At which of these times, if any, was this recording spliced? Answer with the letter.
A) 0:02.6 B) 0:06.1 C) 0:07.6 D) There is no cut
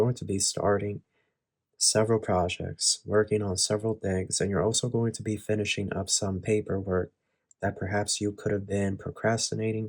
D